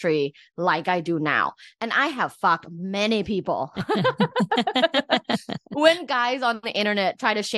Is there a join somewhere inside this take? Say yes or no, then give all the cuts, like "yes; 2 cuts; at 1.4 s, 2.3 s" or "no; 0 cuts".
no; 0 cuts